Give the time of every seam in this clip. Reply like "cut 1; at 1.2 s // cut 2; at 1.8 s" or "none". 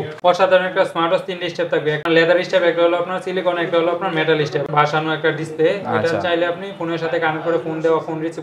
cut 1; at 2.0 s // cut 2; at 4.7 s